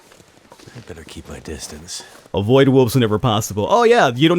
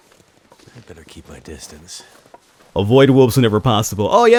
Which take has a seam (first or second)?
first